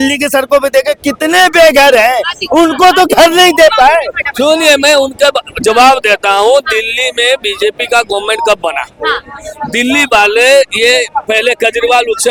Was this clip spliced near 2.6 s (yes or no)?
no